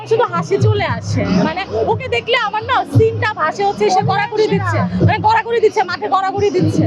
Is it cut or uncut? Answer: uncut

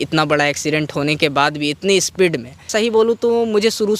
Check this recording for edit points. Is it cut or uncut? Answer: cut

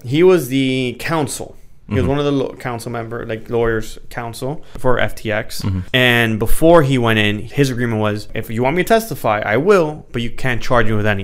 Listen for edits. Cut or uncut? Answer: cut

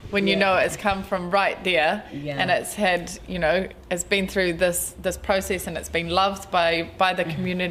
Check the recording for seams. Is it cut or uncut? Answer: uncut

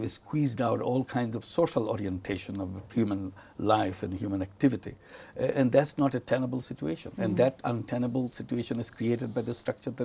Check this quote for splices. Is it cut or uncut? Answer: uncut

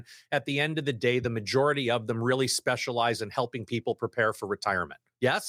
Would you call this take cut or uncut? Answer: uncut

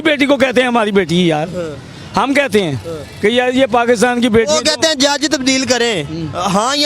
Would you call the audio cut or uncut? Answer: uncut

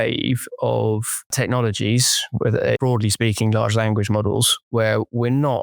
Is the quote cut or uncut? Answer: cut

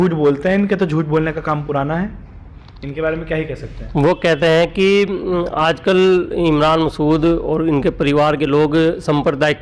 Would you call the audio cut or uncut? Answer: uncut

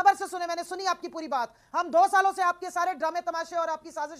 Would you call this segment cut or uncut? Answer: uncut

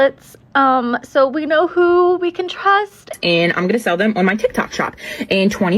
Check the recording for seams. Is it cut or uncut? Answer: cut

